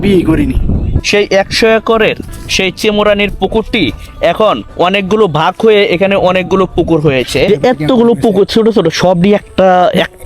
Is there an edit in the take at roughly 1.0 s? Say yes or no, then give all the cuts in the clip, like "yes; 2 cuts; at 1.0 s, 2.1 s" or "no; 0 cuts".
yes; 2 cuts; at 1.0 s, 7.5 s